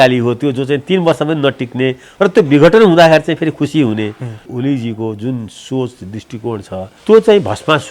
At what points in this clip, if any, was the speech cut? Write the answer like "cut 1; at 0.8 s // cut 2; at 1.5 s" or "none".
cut 1; at 4.5 s // cut 2; at 6.9 s